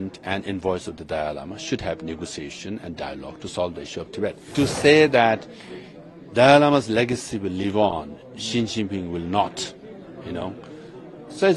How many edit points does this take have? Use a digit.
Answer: 1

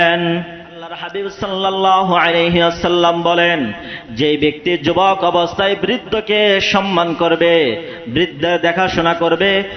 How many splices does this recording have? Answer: 1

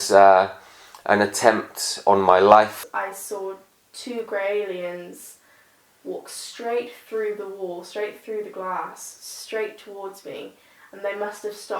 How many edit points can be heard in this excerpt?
1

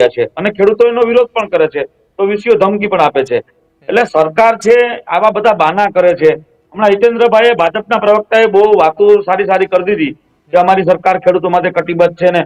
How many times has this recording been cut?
0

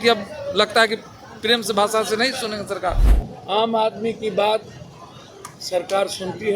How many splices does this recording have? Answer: 1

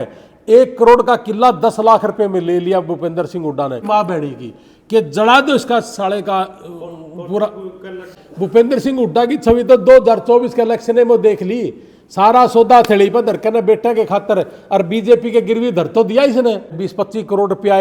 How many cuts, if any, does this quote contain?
3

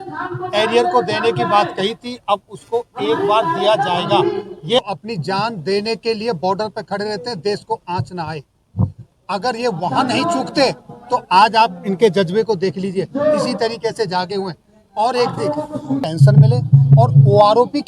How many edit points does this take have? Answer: 2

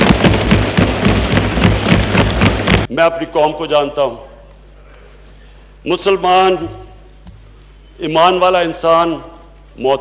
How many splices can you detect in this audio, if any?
1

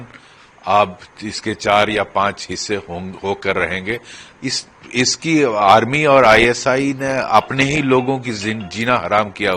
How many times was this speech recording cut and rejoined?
0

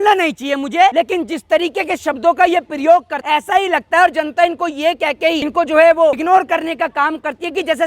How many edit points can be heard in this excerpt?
4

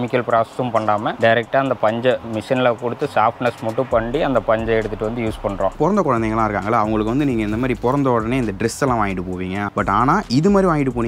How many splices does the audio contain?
2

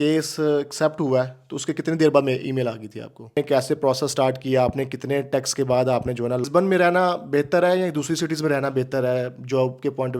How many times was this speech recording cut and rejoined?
2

